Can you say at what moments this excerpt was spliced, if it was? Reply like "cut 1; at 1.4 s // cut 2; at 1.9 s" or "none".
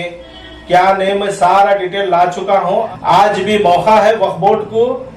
cut 1; at 2.9 s